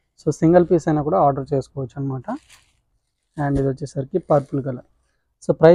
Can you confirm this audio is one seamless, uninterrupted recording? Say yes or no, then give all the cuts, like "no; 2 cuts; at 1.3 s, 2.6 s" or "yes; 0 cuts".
yes; 0 cuts